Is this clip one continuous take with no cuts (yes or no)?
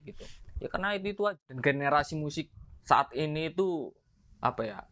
no